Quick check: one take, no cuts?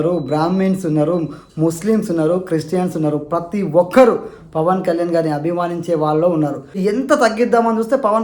no; 1 cut; at 6.8 s

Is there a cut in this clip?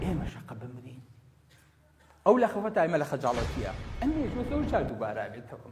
yes; 1 cut; at 3.8 s

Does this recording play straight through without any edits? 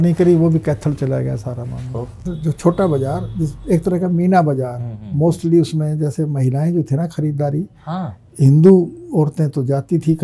no; 1 cut; at 2.2 s

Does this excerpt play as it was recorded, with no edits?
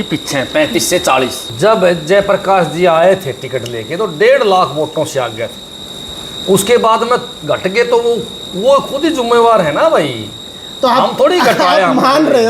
no; 1 cut; at 1.4 s

